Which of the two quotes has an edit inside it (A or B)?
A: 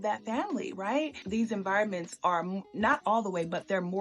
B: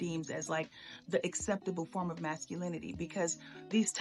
A